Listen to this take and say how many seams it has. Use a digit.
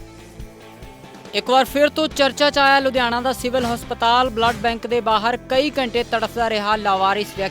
1